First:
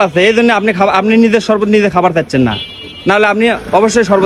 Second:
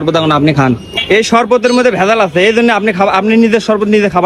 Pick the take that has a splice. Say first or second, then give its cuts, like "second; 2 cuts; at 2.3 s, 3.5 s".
second; 1 cut; at 0.9 s